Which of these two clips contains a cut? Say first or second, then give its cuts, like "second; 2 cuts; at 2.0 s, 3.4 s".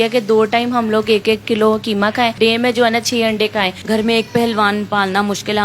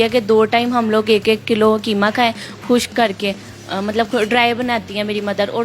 first; 2 cuts; at 2.4 s, 3.8 s